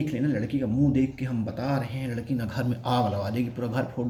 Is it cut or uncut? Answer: uncut